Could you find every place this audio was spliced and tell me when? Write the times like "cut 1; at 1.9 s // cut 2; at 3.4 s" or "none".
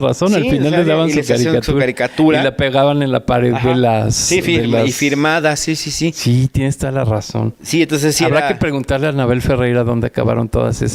none